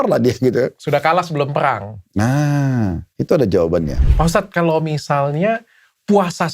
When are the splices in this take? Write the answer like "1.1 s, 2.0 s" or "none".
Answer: 4.1 s